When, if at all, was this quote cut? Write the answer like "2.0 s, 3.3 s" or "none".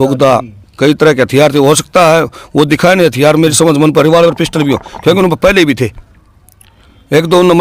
none

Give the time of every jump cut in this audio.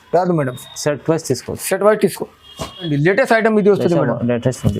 2.9 s

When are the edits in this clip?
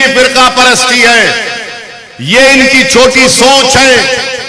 none

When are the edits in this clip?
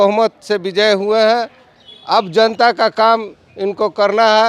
none

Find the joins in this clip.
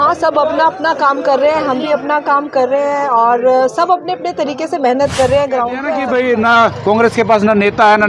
5.9 s

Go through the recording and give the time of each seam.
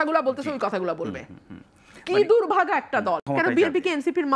3.2 s

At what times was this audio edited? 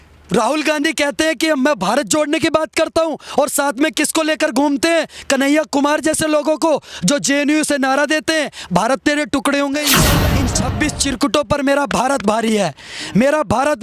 10.1 s

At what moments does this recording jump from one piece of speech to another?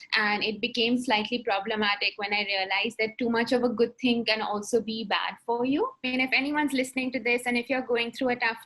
6.0 s

